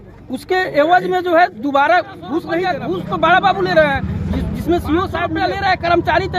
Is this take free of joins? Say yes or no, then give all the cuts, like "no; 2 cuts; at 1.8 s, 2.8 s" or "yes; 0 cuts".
no; 2 cuts; at 2.6 s, 5.3 s